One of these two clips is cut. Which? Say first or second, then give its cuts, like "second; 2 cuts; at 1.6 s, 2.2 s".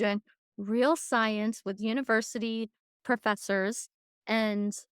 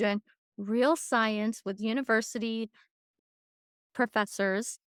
first; 1 cut; at 2.9 s